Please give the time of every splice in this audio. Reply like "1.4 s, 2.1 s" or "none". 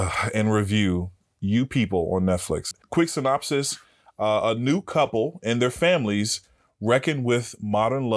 2.7 s